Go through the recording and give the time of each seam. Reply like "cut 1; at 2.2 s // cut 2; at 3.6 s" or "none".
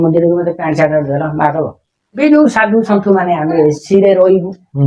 cut 1; at 2.1 s